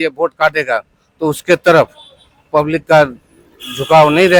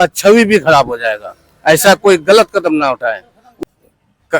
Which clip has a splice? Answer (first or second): second